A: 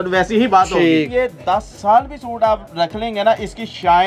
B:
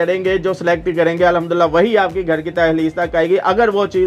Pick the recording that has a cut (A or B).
A